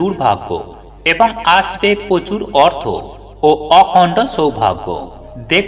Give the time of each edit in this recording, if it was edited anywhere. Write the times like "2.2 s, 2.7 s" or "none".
none